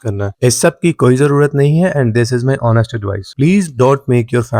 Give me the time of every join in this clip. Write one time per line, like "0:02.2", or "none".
none